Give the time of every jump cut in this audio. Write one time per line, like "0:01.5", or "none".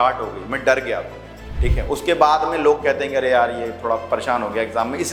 none